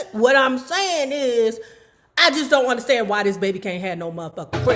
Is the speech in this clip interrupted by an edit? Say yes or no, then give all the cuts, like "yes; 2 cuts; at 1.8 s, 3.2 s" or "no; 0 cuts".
no; 0 cuts